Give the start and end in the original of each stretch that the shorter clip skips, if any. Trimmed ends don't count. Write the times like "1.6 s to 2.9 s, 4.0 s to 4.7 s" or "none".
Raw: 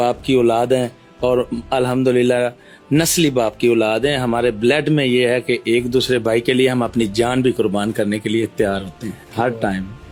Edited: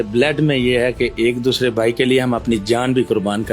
none